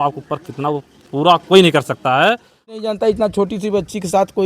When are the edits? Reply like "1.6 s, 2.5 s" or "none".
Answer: 2.9 s